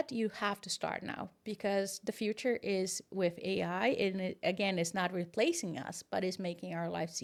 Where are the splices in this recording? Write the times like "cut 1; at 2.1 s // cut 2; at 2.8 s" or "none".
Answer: none